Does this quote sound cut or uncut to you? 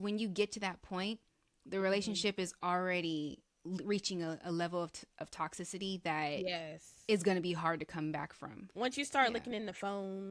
cut